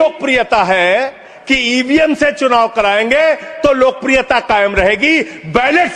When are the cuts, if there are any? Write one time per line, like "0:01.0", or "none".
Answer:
0:01.2